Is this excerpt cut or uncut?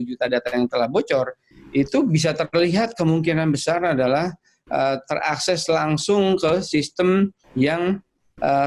uncut